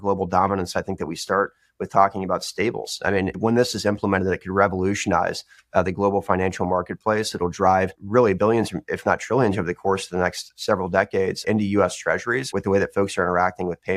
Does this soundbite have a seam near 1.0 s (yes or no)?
no